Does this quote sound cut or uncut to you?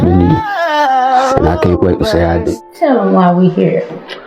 cut